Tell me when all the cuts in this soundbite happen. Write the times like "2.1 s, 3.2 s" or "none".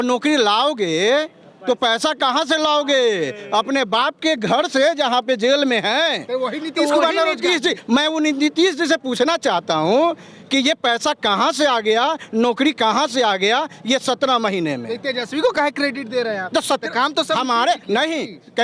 none